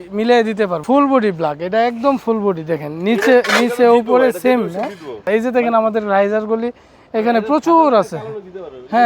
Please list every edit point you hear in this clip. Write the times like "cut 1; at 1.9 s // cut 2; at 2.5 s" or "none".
cut 1; at 0.8 s // cut 2; at 5.1 s